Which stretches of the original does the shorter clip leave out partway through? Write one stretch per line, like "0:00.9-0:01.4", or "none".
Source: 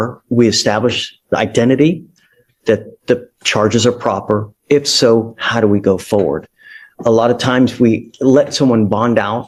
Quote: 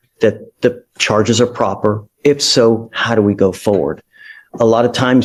none

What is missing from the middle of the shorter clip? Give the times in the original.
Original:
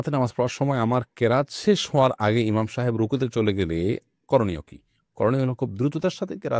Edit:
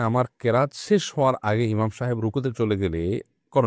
none

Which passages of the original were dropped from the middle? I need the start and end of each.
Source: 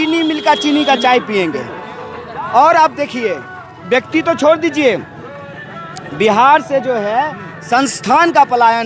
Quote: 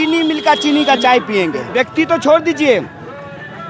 0:01.6-0:03.8

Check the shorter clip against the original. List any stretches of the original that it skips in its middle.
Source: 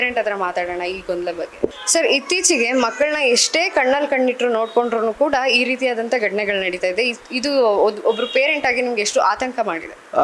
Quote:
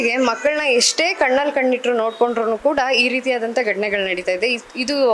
none

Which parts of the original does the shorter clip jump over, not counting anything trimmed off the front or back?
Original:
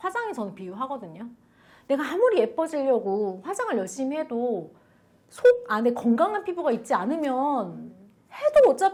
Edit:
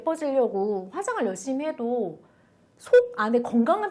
none

